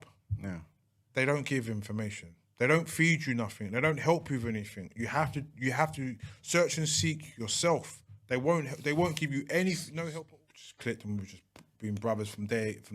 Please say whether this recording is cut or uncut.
cut